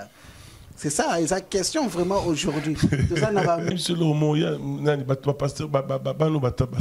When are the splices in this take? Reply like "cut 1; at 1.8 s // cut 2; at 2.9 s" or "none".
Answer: cut 1; at 3.7 s